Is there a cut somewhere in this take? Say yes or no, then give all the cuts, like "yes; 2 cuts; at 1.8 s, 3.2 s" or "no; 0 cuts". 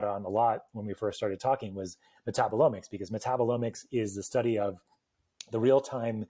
no; 0 cuts